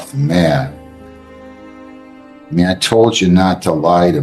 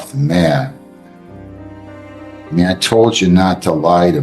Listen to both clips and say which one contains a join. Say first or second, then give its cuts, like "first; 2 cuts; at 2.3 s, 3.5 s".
second; 2 cuts; at 0.8 s, 2.5 s